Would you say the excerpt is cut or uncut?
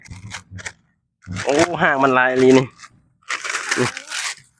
uncut